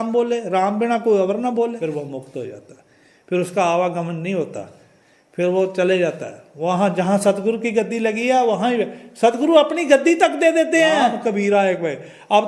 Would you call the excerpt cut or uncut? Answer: cut